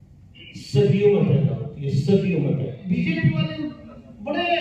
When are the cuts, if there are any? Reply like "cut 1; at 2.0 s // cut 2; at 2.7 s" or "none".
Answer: cut 1; at 2.8 s